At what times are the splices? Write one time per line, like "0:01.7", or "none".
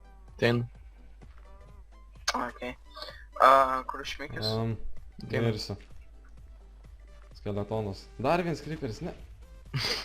0:07.7